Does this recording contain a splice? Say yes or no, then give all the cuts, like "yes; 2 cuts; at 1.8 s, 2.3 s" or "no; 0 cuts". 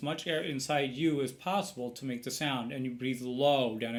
no; 0 cuts